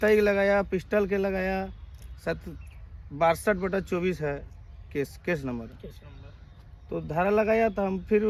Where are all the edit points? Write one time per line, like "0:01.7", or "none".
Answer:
none